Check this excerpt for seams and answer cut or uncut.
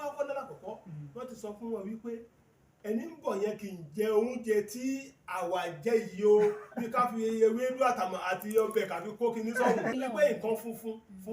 cut